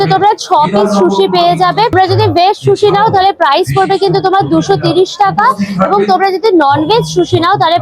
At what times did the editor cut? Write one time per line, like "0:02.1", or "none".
none